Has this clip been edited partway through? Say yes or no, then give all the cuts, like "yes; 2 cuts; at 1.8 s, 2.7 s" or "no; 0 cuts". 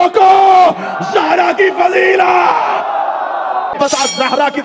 yes; 1 cut; at 3.7 s